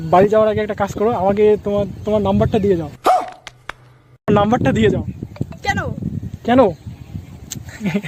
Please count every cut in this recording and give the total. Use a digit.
0